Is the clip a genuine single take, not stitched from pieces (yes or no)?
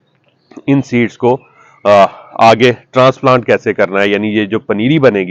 yes